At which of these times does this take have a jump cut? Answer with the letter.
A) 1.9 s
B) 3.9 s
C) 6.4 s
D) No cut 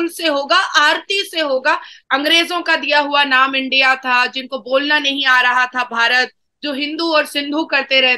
A